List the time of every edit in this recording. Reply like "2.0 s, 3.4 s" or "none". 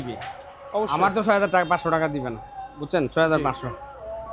none